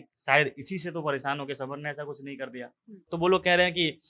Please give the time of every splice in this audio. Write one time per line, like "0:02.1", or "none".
0:03.1